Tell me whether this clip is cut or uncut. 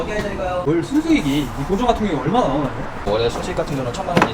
uncut